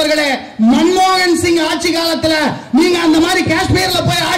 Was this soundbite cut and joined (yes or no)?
no